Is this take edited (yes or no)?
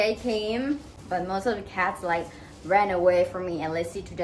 yes